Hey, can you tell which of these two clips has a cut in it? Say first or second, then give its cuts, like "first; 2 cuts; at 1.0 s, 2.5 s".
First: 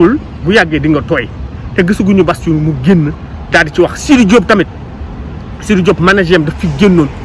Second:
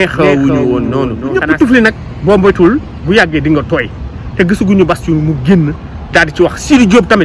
second; 1 cut; at 1.2 s